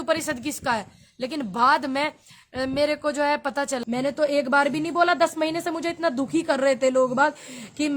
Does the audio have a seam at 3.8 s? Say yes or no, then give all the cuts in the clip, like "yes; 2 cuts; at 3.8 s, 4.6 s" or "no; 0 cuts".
yes; 1 cut; at 3.8 s